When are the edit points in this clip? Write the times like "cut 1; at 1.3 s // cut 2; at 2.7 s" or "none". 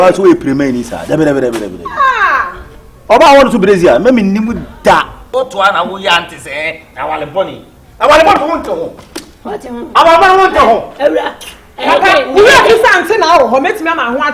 cut 1; at 5.2 s